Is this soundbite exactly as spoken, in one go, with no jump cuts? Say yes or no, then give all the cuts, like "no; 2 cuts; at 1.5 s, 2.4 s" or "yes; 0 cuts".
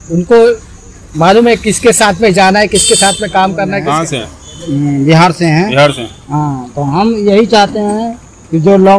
no; 1 cut; at 3.9 s